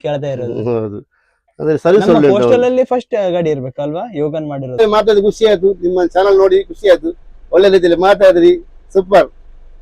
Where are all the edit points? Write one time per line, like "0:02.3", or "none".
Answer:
0:04.8